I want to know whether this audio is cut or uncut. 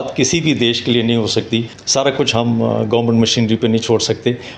cut